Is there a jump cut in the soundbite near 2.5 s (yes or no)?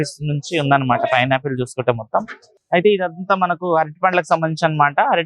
yes